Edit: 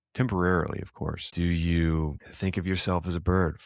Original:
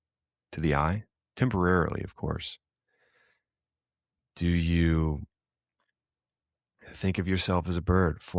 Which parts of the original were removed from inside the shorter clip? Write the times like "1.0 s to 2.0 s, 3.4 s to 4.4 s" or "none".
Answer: 2.4 s to 4.3 s, 5.3 s to 6.9 s